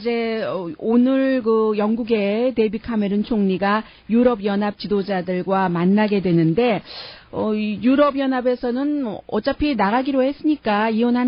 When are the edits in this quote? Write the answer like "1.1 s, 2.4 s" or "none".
9.0 s

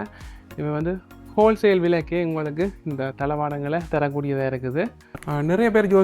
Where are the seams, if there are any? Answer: 5.1 s

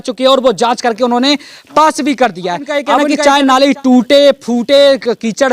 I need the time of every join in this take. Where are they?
3.1 s

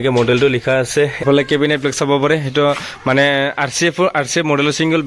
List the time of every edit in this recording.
1.2 s

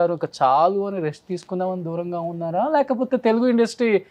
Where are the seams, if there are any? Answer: none

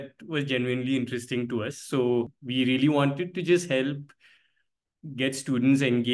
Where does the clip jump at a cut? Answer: 2.4 s

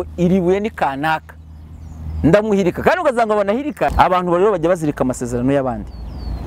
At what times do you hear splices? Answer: 3.9 s

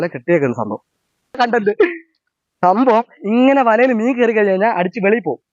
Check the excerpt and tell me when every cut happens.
1.4 s

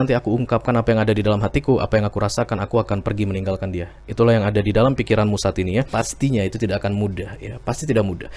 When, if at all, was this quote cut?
5.9 s

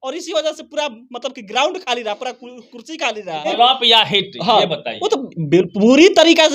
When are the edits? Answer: 3.5 s

